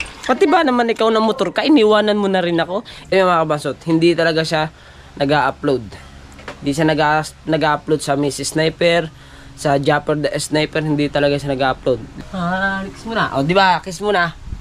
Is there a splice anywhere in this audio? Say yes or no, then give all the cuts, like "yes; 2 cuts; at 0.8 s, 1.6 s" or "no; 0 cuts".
yes; 2 cuts; at 3.1 s, 12.2 s